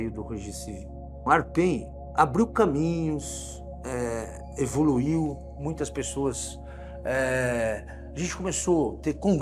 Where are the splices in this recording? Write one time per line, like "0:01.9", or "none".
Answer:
0:01.0

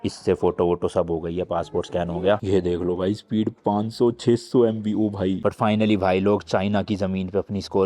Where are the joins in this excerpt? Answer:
0:02.4
0:05.4

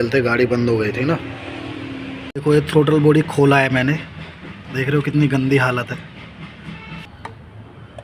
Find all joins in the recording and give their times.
0:02.3
0:07.1

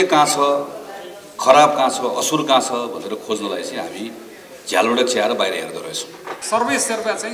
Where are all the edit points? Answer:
0:06.3

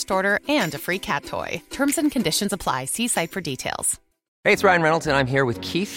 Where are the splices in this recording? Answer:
0:04.2

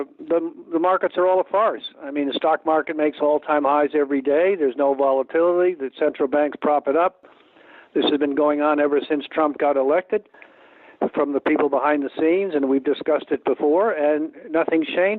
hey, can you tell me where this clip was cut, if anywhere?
none

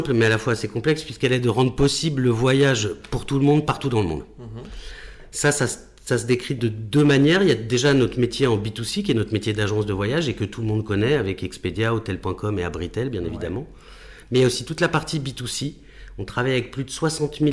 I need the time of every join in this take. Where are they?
none

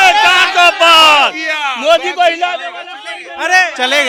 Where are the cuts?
none

